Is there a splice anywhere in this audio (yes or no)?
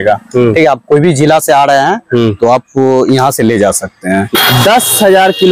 yes